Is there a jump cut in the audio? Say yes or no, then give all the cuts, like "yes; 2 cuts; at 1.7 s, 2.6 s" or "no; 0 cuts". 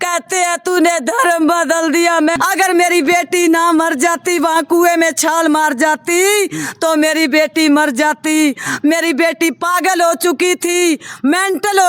yes; 1 cut; at 2.4 s